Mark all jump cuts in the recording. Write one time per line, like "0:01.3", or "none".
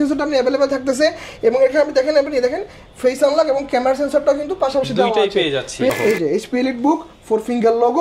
0:05.9